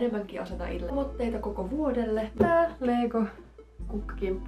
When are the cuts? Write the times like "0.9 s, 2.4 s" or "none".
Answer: 0.9 s, 2.3 s